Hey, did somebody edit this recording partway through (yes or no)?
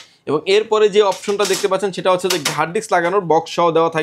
no